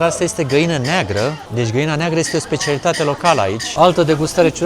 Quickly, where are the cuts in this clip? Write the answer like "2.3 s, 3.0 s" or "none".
1.4 s, 3.6 s